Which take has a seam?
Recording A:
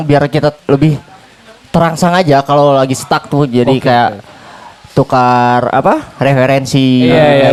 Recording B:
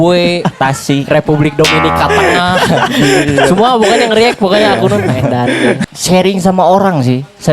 B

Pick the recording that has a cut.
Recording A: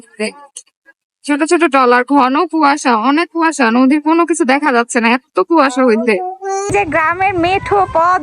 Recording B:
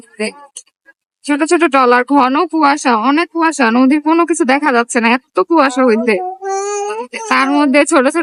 A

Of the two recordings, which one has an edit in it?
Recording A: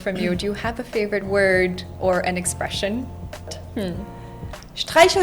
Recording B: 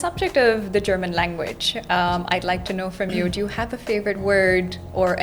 A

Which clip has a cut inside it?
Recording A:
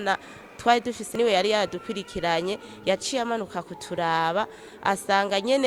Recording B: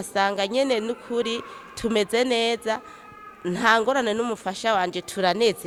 A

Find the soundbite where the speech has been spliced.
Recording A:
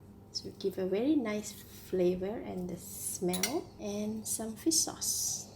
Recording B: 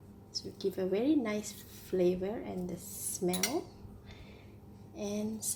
A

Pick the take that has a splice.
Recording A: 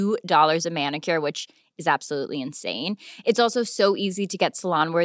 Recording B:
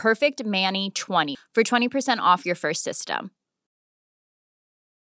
B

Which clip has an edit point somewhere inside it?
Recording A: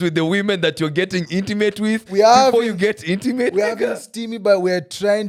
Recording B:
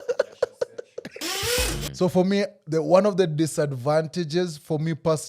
B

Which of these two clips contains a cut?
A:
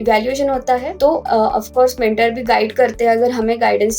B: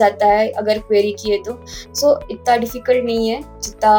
A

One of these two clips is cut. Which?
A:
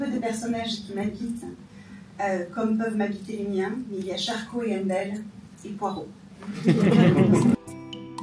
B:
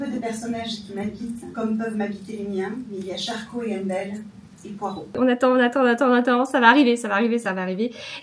B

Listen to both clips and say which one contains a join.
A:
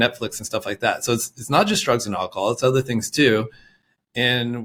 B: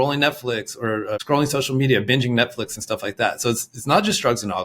B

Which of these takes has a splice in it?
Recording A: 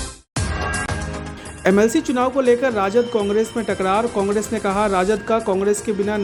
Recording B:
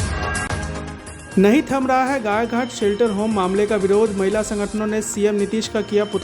B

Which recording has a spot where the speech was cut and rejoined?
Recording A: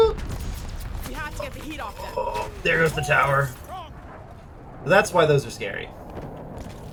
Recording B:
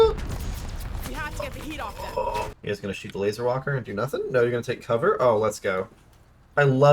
B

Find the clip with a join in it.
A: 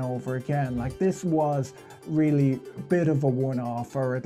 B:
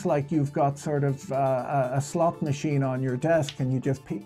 A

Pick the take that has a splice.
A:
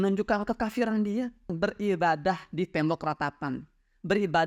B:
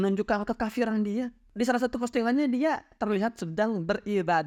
A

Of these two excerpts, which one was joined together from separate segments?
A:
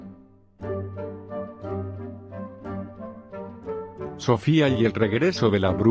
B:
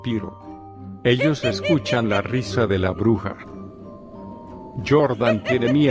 A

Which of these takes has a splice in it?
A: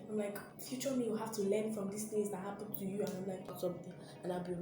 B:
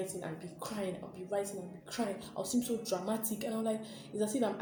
A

